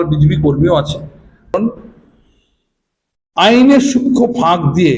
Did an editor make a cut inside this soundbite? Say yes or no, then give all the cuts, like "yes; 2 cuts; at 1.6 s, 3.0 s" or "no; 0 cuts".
yes; 1 cut; at 1.5 s